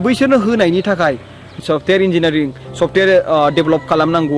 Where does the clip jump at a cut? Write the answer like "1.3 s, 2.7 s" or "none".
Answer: 1.6 s